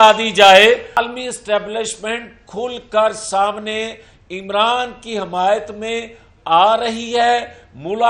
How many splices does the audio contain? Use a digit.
1